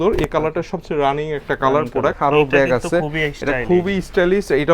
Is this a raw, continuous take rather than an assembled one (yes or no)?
no